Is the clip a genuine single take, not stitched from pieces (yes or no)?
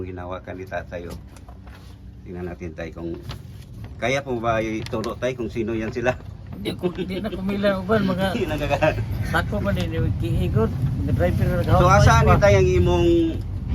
yes